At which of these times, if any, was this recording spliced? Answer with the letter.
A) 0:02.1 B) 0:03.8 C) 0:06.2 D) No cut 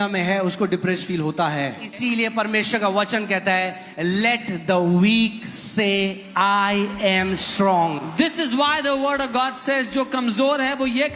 A